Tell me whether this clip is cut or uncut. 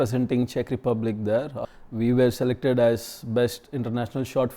cut